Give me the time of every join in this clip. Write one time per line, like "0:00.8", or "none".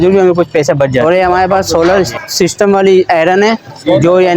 0:01.0